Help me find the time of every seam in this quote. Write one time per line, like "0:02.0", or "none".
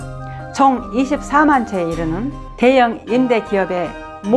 none